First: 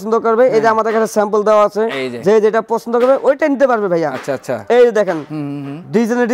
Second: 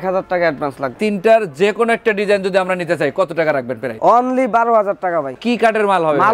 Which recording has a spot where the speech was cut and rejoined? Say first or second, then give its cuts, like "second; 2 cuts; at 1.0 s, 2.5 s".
second; 2 cuts; at 0.9 s, 5.4 s